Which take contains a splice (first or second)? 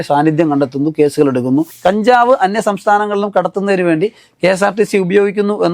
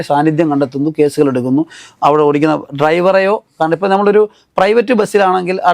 first